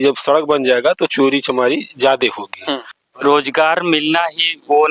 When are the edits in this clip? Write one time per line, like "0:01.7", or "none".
0:03.0